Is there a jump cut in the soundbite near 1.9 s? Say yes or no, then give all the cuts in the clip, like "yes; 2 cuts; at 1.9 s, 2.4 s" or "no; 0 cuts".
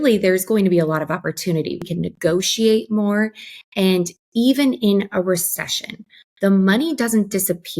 yes; 1 cut; at 1.9 s